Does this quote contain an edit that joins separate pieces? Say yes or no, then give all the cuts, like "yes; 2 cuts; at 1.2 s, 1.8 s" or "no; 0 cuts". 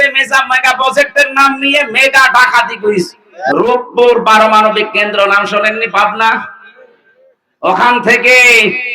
yes; 1 cut; at 3.3 s